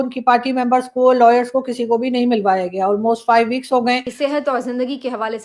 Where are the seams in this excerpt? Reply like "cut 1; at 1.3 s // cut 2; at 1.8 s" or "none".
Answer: cut 1; at 4.1 s